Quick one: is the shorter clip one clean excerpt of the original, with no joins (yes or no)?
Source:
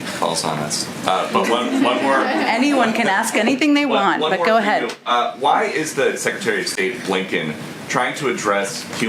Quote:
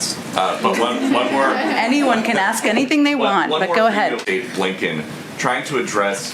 no